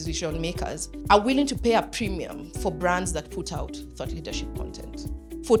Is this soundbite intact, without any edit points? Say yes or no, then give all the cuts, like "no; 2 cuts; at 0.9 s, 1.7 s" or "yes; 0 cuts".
yes; 0 cuts